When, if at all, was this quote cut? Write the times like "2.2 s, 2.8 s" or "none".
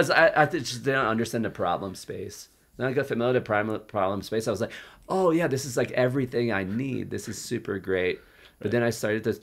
none